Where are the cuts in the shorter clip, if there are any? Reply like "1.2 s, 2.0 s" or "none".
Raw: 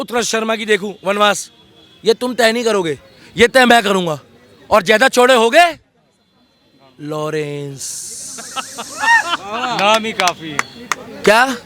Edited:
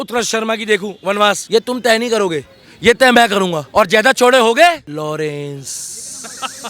1.4 s, 3.6 s, 4.9 s